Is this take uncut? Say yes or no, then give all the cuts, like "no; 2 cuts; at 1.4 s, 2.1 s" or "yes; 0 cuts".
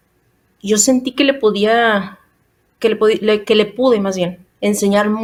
yes; 0 cuts